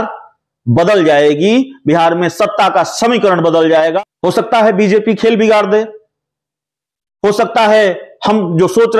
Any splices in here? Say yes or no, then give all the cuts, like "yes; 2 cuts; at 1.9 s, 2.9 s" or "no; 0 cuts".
yes; 1 cut; at 4.0 s